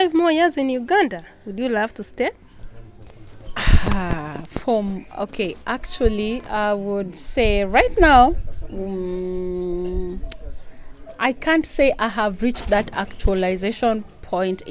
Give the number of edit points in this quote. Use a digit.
0